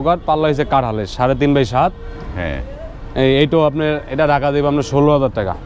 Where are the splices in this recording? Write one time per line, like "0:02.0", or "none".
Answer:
none